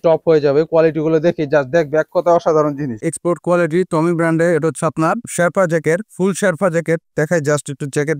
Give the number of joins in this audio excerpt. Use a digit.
1